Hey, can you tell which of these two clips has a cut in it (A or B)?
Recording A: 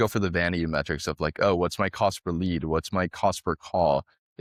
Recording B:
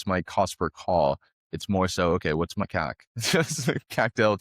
B